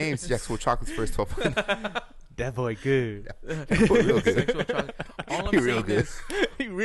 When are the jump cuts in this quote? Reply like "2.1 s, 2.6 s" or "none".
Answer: none

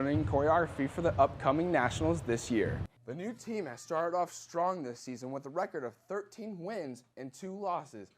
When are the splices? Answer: 2.9 s

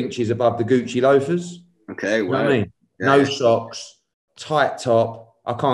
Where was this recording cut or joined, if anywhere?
none

